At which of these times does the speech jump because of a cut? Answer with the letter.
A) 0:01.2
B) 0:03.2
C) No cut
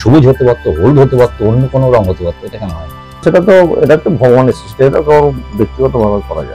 B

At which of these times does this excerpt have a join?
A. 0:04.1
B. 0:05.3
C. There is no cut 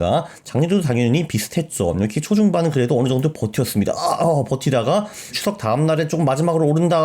B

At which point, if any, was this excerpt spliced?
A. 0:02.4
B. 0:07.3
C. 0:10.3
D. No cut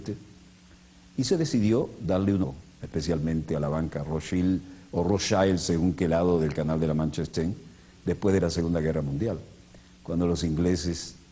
D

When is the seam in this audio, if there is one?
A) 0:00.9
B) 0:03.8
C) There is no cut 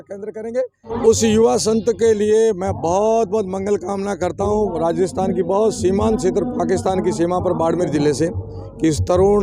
A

